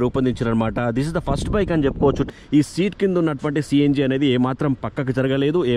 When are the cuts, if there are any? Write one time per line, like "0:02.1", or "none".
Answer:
0:02.3